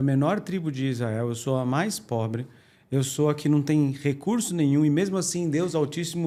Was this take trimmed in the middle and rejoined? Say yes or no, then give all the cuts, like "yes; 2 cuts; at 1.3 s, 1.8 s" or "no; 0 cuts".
no; 0 cuts